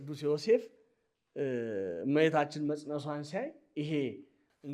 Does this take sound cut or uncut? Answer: uncut